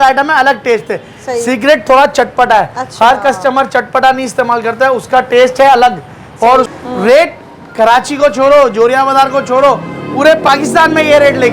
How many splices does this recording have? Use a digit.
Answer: 1